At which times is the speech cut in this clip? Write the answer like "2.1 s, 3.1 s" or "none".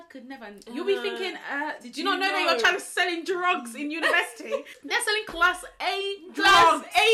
4.7 s